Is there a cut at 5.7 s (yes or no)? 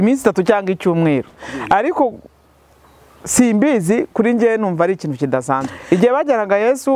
yes